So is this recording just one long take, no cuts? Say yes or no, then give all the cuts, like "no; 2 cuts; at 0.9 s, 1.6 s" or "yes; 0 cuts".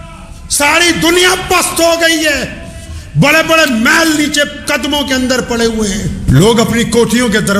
no; 1 cut; at 6.2 s